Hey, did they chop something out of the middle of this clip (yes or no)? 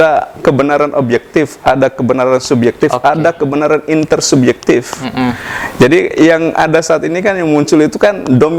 no